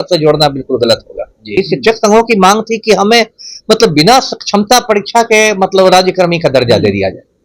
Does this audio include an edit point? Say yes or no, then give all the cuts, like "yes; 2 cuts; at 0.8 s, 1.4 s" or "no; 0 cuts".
yes; 1 cut; at 1.5 s